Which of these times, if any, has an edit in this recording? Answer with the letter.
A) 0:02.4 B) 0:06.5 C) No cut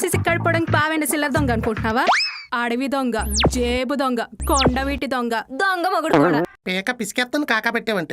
B